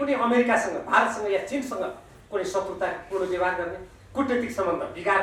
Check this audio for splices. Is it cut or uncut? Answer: uncut